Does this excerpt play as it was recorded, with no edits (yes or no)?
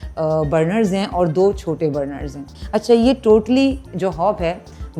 no